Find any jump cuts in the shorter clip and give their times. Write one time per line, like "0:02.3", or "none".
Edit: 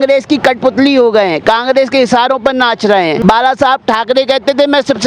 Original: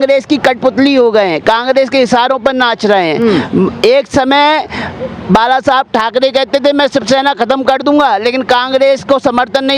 0:03.2